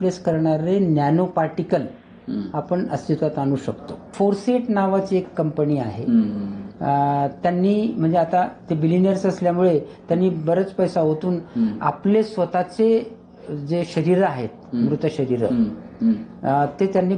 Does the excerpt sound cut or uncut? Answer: cut